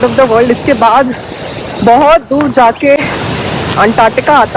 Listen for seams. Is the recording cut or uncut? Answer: uncut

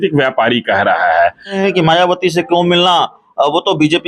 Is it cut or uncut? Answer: cut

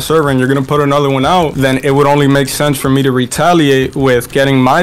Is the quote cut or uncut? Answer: uncut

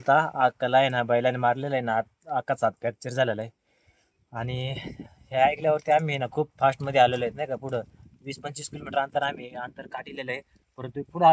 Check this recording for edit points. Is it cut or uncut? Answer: uncut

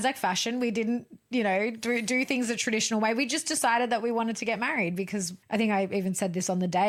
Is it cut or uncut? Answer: uncut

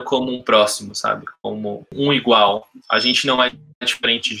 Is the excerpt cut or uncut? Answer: cut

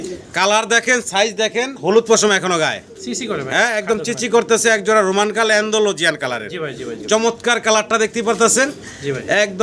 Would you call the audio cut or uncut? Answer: uncut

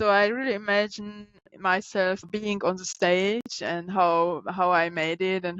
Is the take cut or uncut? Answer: cut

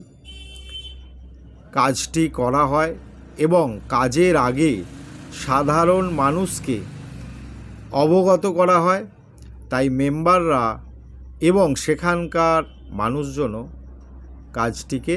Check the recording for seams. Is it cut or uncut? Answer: uncut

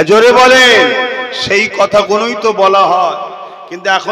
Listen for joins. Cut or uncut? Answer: uncut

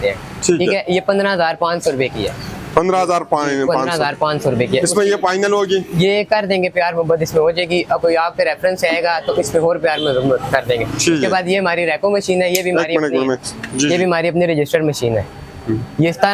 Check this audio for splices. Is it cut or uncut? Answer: uncut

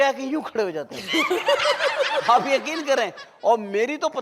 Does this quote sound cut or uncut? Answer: uncut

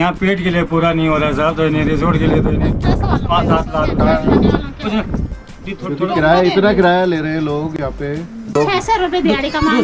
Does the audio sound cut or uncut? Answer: uncut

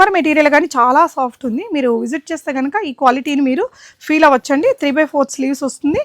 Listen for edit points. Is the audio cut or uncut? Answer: uncut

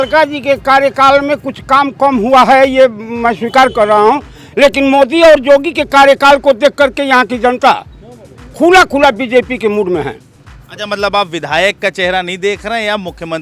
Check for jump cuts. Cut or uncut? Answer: uncut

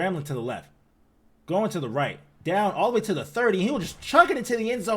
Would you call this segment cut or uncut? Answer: cut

